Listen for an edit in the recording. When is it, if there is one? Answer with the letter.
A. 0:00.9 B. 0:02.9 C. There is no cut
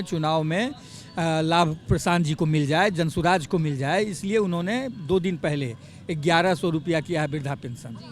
C